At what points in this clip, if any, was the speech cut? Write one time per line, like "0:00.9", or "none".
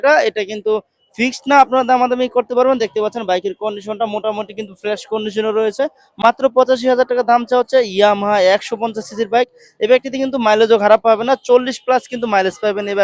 none

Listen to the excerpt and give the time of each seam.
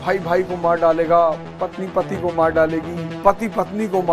0:03.0

